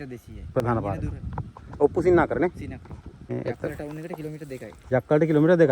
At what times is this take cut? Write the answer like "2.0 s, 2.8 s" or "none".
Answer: 3.3 s